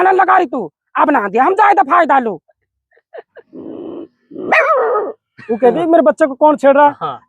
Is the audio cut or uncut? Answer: cut